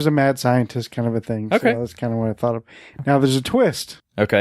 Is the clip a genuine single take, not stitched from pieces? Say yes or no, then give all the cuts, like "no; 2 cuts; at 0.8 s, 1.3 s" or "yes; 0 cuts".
no; 1 cut; at 2.2 s